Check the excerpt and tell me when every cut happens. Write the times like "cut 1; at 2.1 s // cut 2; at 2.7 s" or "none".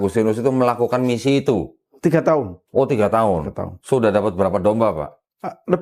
none